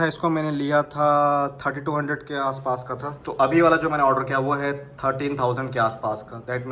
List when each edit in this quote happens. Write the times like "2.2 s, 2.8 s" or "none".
none